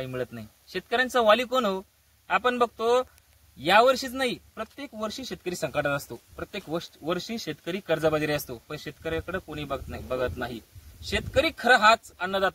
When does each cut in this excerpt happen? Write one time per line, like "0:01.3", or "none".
none